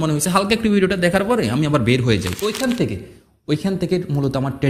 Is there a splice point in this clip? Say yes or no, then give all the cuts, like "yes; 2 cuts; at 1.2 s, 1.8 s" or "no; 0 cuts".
yes; 1 cut; at 2.4 s